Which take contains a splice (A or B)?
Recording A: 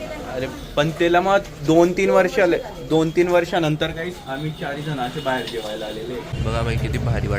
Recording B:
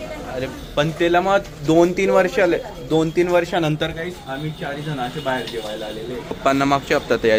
A